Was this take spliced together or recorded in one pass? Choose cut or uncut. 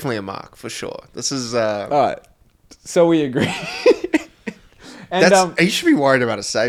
uncut